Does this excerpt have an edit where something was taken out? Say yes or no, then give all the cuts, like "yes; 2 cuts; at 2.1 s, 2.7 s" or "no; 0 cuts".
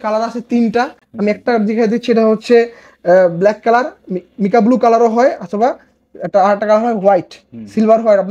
no; 0 cuts